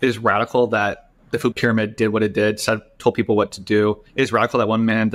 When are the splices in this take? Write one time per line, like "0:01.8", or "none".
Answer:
0:01.4
0:04.1